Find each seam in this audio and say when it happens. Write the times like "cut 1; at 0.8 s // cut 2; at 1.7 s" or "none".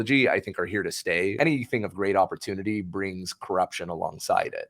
cut 1; at 1.3 s